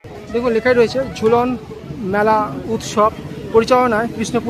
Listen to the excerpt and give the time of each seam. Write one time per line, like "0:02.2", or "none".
none